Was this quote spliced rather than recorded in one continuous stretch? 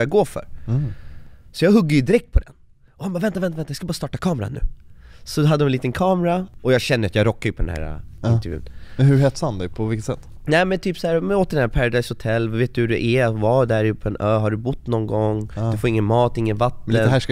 no; 0 cuts

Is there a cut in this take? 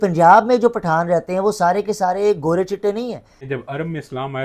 yes; 1 cut; at 3.3 s

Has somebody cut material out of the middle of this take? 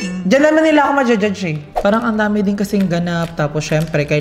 yes; 1 cut; at 1.6 s

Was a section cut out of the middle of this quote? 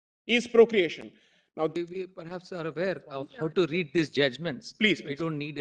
yes; 1 cut; at 1.7 s

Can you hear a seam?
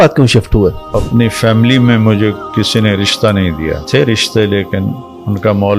yes; 2 cuts; at 0.9 s, 3.8 s

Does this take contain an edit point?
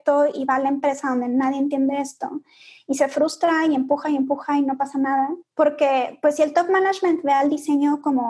yes; 1 cut; at 5.4 s

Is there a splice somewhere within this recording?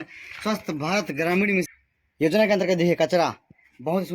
yes; 1 cut; at 1.7 s

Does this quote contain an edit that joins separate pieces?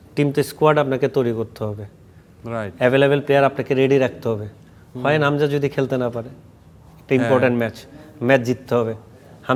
no; 0 cuts

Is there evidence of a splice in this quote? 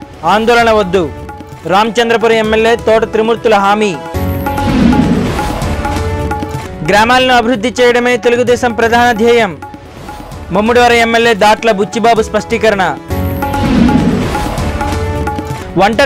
no; 0 cuts

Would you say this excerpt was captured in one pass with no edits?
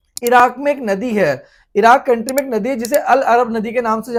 yes; 0 cuts

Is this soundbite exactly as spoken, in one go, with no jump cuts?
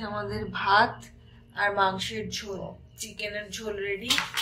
yes; 0 cuts

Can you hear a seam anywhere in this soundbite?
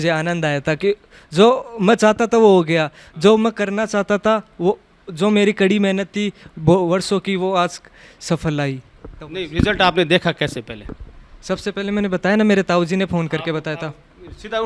no; 0 cuts

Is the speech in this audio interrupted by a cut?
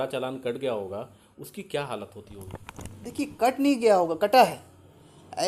no; 0 cuts

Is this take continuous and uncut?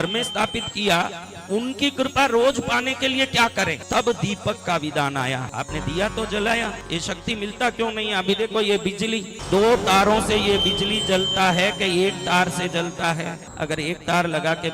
no; 5 cuts; at 3.8 s, 5.4 s, 6.8 s, 9.3 s, 13.4 s

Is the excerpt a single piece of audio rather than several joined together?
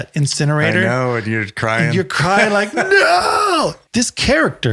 no; 1 cut; at 3.8 s

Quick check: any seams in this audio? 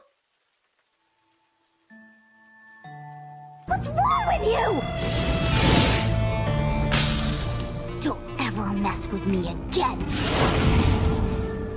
no; 0 cuts

